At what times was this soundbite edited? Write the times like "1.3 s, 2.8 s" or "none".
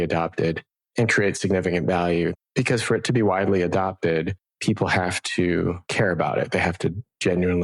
2.3 s, 4.4 s, 5.8 s